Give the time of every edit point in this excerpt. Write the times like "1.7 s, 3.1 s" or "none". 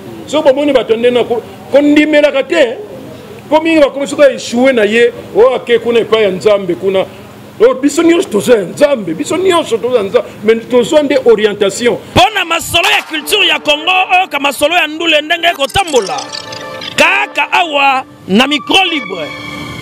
12.0 s